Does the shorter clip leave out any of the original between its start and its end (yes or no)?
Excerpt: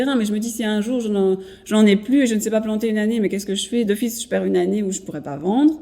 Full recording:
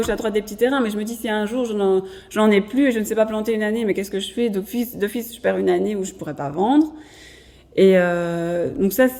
yes